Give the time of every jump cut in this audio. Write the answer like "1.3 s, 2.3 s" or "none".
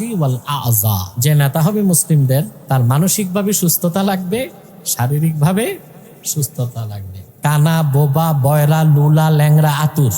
1.1 s, 2.6 s